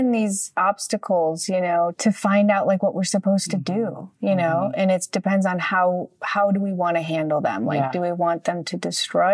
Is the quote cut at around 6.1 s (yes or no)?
no